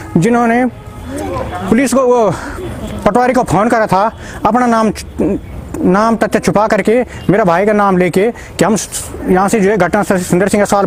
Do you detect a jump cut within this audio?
no; 0 cuts

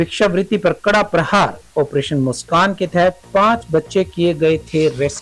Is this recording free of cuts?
yes; 0 cuts

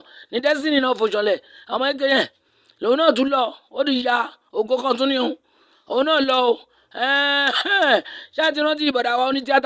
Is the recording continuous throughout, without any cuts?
yes; 0 cuts

